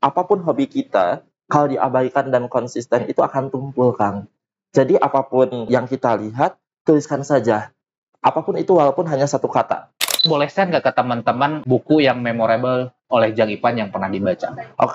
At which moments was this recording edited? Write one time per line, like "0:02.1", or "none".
0:05.7
0:10.2
0:11.6
0:13.0